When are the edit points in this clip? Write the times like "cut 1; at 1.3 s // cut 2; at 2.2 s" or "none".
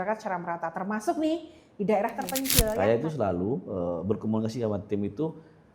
cut 1; at 2.7 s